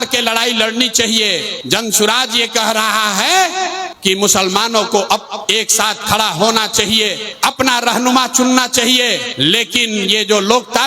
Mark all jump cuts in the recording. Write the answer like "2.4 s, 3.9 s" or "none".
1.5 s, 3.9 s, 5.4 s, 7.2 s, 9.3 s